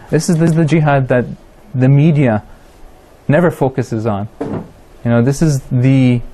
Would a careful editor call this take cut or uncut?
uncut